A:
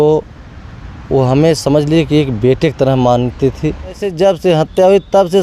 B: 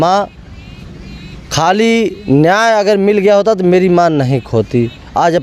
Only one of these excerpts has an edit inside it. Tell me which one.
A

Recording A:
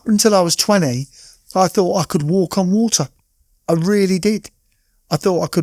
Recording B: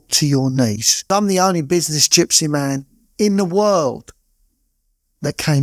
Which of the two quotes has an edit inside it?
B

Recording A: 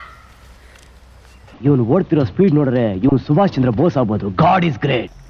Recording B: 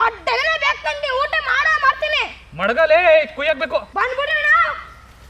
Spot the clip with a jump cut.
B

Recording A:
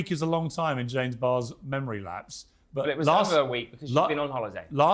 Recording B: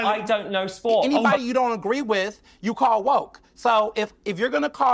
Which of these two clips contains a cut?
B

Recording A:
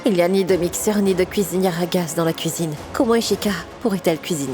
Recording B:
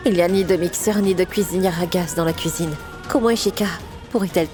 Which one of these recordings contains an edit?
A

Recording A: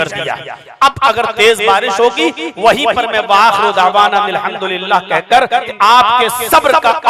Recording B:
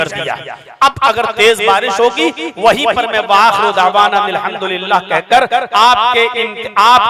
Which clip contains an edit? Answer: A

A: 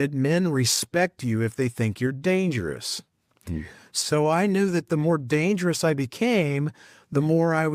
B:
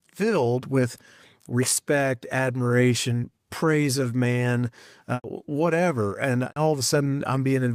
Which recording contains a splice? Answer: B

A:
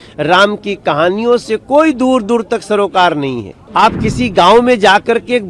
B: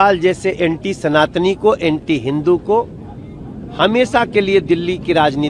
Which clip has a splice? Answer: A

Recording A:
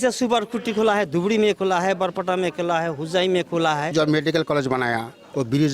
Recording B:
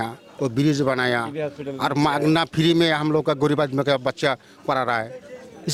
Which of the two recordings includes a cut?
A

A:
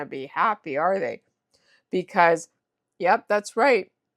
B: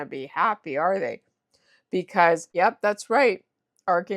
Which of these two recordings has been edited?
B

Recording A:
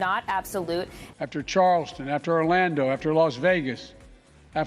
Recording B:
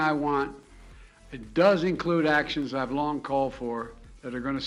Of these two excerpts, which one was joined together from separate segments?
A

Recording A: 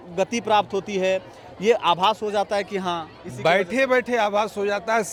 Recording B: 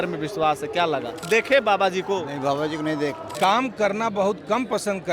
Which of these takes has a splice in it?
B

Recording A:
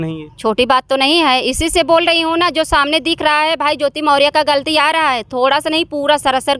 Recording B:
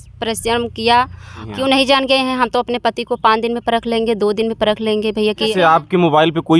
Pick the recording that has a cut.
B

